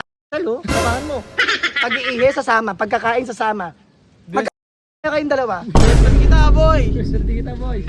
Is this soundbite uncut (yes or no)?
yes